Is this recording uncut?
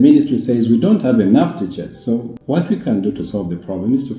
no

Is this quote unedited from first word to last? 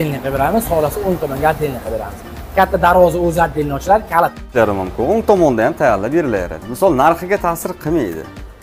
no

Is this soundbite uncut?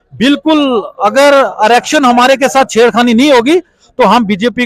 yes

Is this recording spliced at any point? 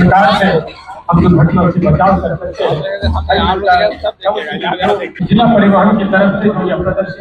yes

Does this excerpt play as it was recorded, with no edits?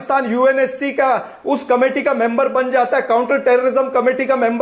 yes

